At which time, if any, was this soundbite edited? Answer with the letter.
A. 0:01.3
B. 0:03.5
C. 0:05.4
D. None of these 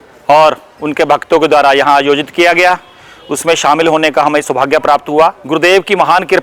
C